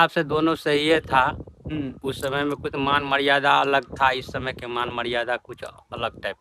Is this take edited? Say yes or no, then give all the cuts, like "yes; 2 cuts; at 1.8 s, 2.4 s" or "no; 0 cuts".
no; 0 cuts